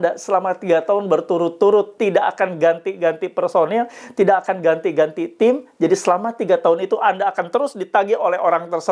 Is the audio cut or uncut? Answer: uncut